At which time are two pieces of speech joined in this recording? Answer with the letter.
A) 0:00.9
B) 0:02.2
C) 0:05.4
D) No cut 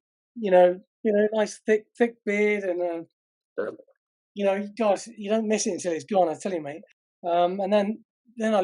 A